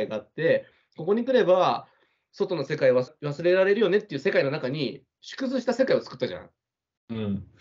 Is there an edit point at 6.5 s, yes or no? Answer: no